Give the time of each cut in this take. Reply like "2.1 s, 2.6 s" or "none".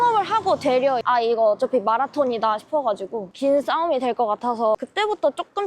1.0 s, 4.8 s